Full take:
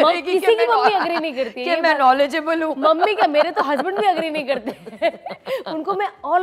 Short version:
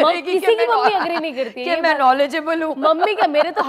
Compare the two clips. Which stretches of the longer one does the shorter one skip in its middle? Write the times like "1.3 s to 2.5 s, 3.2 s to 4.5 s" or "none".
none